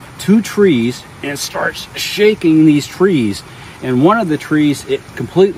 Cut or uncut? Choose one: uncut